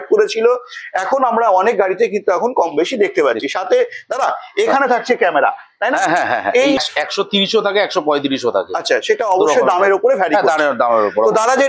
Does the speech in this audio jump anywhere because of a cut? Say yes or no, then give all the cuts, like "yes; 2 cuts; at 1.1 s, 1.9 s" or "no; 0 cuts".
yes; 1 cut; at 6.8 s